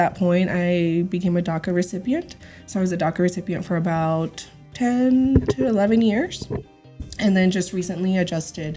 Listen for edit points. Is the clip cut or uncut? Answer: uncut